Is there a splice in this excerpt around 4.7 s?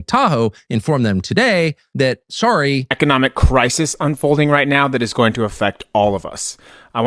no; 1 cut; at 2.9 s

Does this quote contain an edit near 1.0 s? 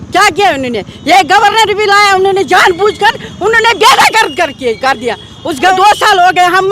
no; 1 cut; at 5.7 s

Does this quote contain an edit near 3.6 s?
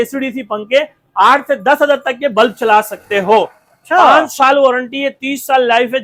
no; 0 cuts

